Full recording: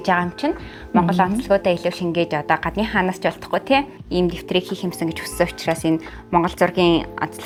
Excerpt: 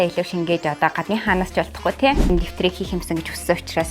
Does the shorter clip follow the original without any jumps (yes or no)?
no